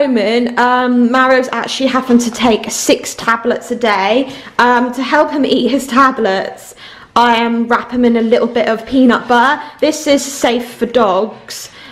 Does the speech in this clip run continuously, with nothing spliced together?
yes; 0 cuts

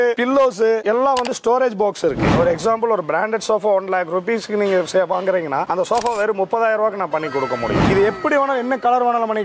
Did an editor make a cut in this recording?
yes; 2 cuts; at 2.3 s, 7.9 s

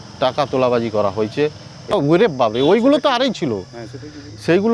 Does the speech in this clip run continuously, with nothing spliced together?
no; 1 cut; at 1.9 s

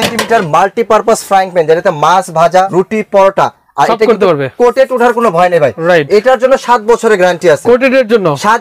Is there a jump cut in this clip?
yes; 1 cut; at 2.7 s

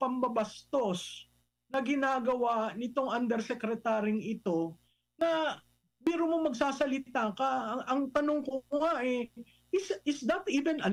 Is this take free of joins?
yes; 0 cuts

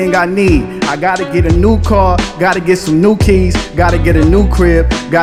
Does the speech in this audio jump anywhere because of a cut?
no; 0 cuts

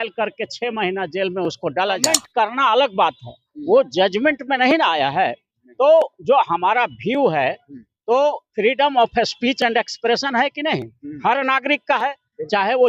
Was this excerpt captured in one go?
no; 1 cut; at 2.2 s

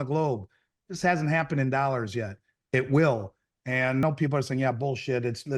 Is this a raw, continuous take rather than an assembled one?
no; 1 cut; at 4.0 s

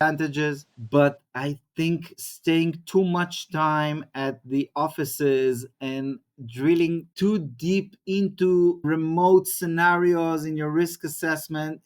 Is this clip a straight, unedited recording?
no; 2 cuts; at 2.2 s, 8.8 s

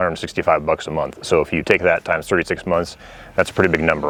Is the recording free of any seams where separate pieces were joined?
yes; 0 cuts

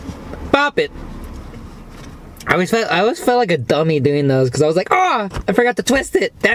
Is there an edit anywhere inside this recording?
no; 0 cuts

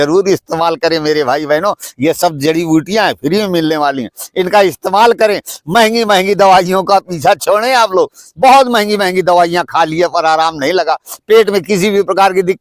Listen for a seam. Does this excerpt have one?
no; 0 cuts

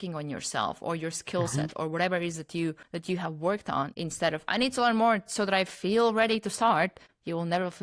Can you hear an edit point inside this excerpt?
yes; 2 cuts; at 2.9 s, 3.9 s

